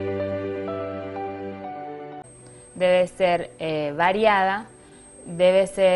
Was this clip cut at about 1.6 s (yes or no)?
no